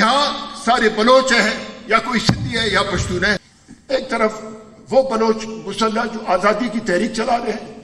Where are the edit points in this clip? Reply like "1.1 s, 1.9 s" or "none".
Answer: 3.5 s